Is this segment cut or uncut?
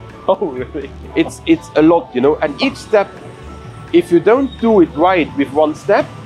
uncut